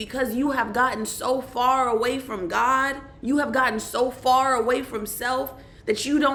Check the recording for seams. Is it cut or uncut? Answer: uncut